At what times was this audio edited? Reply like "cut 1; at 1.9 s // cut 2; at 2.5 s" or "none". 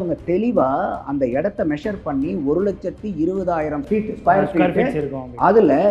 cut 1; at 3.9 s